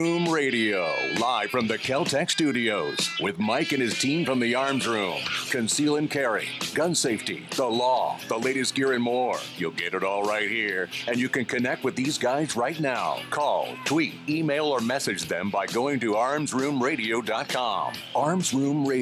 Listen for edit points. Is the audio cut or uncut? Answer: uncut